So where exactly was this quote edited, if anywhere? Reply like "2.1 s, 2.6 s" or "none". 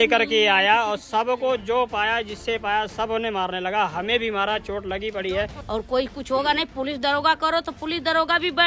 5.6 s